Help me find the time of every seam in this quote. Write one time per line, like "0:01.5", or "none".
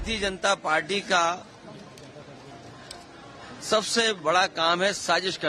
none